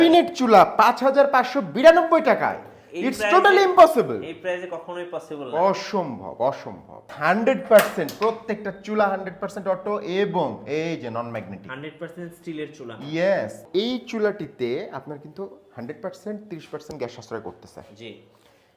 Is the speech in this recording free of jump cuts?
no; 2 cuts; at 7.1 s, 13.6 s

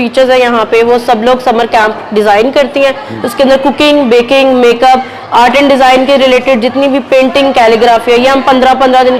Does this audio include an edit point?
no; 0 cuts

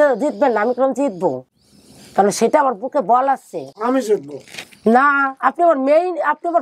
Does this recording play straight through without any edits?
yes; 0 cuts

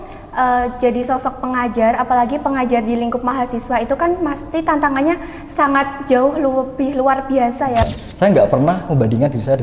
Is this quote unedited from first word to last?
no; 1 cut; at 7.9 s

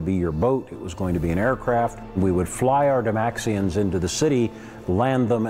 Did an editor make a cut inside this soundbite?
yes; 1 cut; at 2.2 s

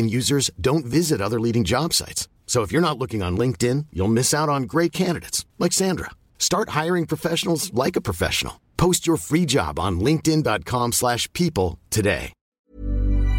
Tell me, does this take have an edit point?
yes; 1 cut; at 12.4 s

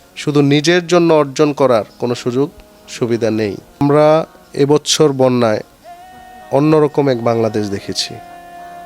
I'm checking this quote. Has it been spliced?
yes; 1 cut; at 3.8 s

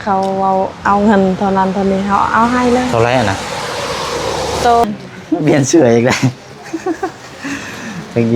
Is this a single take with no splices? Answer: no; 1 cut; at 4.8 s

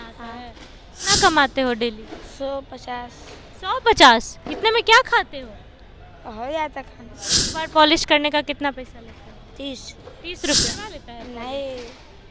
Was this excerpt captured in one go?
no; 3 cuts; at 1.1 s, 7.4 s, 10.7 s

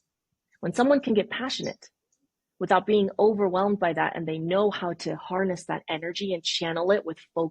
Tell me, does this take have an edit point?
no; 0 cuts

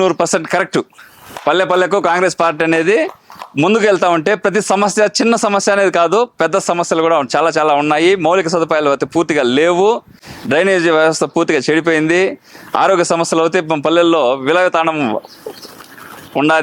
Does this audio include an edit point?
no; 0 cuts

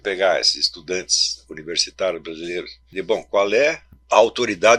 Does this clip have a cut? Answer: yes; 2 cuts; at 2.8 s, 3.9 s

